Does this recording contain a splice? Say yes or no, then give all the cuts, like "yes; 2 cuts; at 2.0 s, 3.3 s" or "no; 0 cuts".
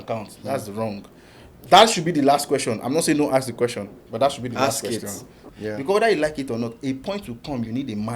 yes; 1 cut; at 5.4 s